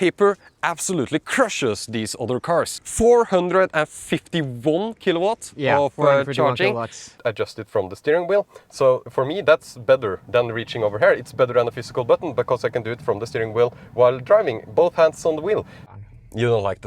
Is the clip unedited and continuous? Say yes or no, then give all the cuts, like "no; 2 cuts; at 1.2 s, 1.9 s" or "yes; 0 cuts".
no; 3 cuts; at 2.8 s, 7.1 s, 15.8 s